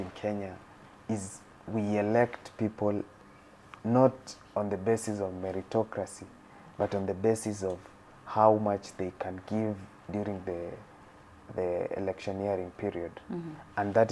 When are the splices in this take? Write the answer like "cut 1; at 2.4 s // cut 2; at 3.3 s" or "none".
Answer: none